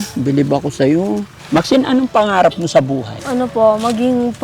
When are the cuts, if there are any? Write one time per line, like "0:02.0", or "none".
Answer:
0:01.3
0:03.1